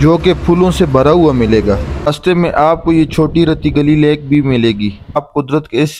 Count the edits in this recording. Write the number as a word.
two